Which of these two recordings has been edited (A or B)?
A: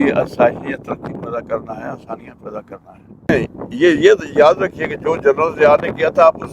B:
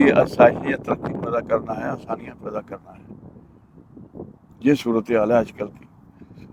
A